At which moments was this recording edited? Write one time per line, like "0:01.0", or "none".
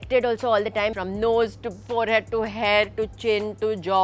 0:01.0